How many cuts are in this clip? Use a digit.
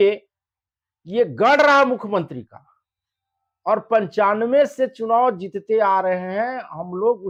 0